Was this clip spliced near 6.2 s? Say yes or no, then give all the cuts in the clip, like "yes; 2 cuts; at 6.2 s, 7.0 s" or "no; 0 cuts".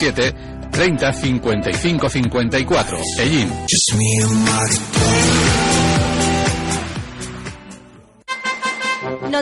no; 2 cuts; at 3.7 s, 8.2 s